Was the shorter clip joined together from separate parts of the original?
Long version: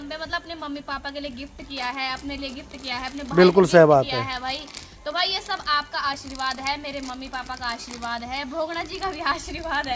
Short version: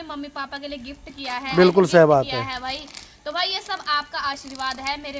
yes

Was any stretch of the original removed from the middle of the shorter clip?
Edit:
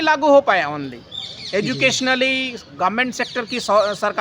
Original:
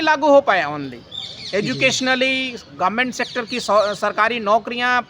no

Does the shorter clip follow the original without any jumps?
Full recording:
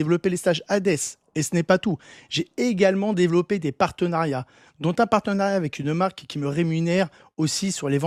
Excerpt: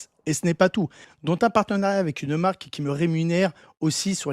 no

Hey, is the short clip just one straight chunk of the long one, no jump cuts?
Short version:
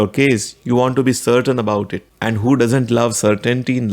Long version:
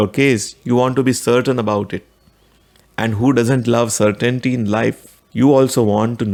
no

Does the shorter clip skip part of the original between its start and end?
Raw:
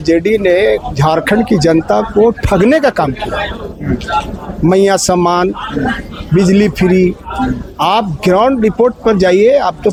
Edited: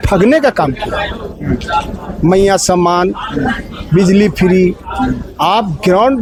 no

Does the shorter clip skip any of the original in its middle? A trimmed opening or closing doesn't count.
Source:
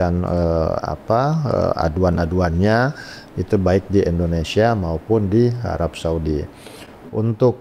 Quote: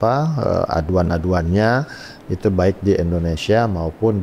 no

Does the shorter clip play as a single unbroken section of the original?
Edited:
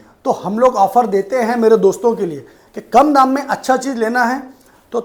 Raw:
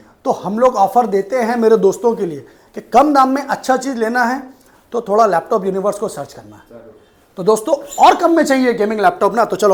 yes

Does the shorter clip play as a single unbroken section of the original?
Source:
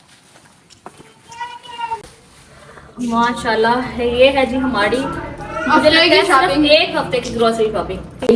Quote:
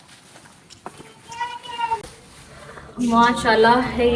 yes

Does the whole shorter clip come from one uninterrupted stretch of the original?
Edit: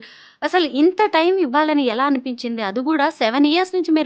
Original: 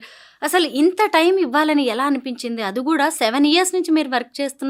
yes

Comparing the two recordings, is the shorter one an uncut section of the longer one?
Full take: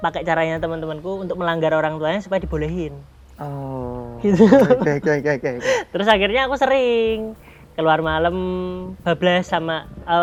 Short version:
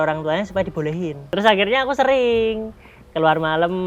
no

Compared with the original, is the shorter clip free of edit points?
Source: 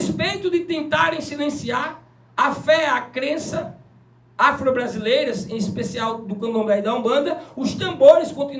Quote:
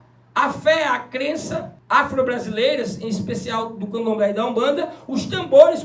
no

